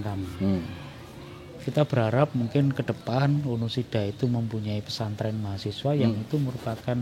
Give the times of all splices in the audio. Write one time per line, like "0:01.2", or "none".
0:01.5

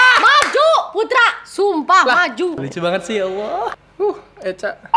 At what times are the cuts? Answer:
0:02.5
0:03.7

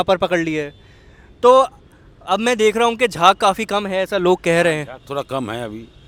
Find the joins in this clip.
none

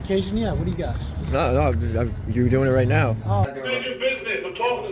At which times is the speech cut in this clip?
0:03.5

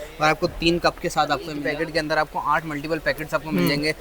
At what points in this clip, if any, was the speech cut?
0:01.6

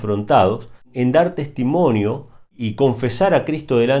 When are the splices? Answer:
0:00.9
0:02.6

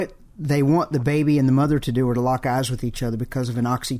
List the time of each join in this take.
none

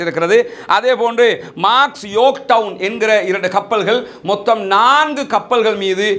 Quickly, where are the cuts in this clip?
none

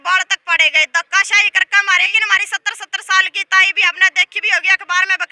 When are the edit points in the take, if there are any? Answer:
0:02.1

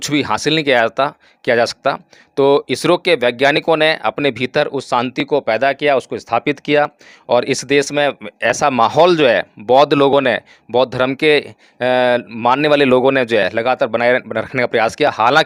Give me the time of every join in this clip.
none

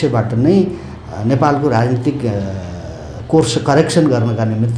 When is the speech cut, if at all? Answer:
none

